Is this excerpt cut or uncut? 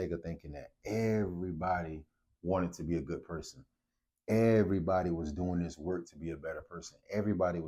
uncut